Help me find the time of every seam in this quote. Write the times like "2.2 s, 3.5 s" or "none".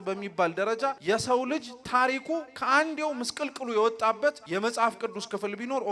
1.0 s, 4.4 s

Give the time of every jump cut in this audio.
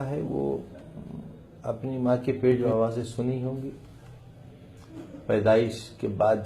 2.6 s

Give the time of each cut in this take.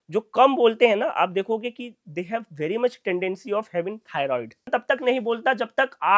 4.7 s

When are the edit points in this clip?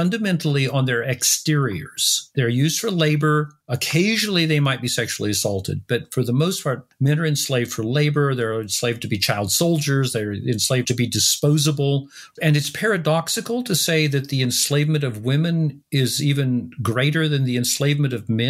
10.9 s, 12.2 s

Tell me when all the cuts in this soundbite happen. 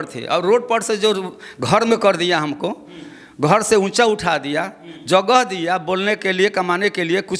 none

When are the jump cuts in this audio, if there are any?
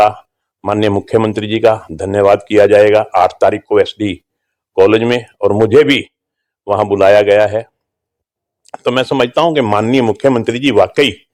none

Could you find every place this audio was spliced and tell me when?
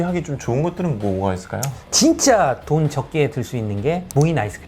1.8 s

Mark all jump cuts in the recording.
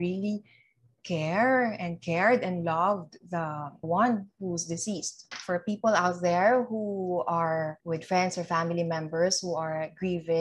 5.4 s

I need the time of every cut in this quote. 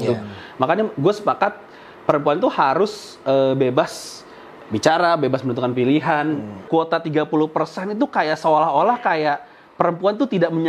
6.7 s

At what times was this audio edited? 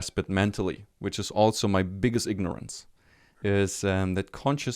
3.3 s

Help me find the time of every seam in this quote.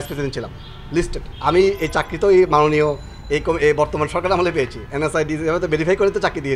1.3 s

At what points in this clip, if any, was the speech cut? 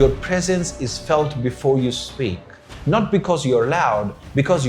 none

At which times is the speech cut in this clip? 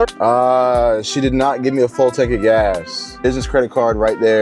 3.2 s

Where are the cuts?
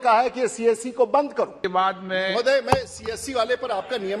1.6 s

